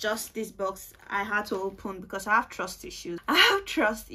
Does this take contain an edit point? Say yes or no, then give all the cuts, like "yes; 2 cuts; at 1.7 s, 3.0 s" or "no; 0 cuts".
yes; 1 cut; at 3.2 s